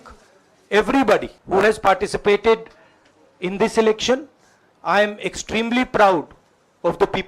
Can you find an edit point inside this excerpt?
yes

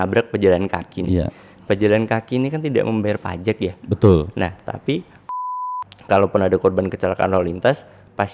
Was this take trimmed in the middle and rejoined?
yes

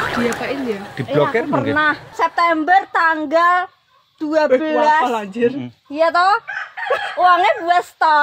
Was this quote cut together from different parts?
yes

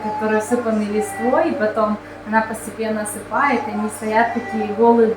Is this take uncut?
yes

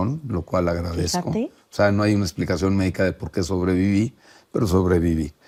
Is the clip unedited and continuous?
yes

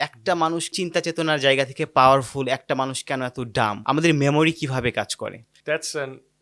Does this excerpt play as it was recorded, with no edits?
yes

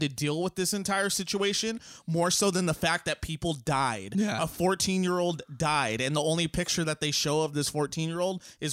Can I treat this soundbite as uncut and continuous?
yes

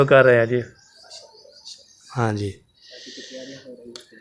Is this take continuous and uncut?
yes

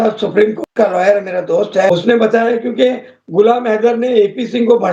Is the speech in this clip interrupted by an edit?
yes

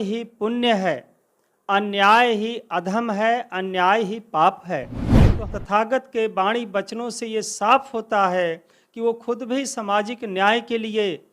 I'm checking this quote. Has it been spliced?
yes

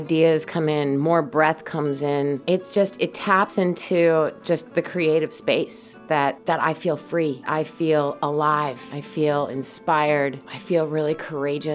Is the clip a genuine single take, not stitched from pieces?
no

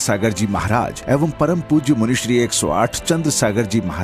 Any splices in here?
no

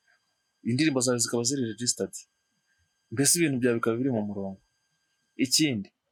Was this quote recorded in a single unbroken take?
yes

